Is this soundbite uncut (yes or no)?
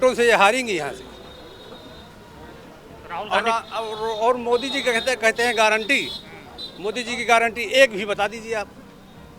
yes